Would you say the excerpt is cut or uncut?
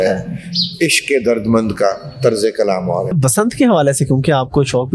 cut